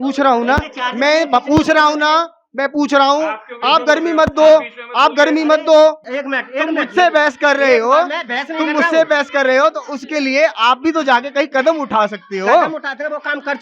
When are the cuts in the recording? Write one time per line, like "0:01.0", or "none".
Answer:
0:06.1